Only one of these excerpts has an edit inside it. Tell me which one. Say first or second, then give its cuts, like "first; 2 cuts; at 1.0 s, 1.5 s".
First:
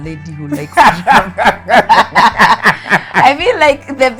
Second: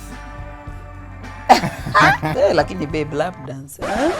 second; 1 cut; at 2.3 s